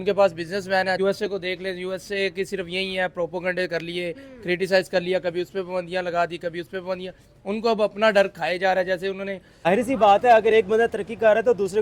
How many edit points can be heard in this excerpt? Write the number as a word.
two